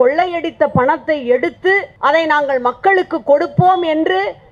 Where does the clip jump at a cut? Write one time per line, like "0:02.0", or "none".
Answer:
0:01.9